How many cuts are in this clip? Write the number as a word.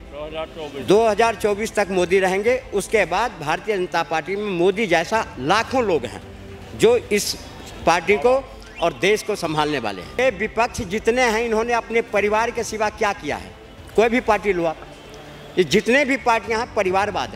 one